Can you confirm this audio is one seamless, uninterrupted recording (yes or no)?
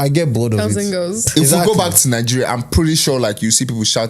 no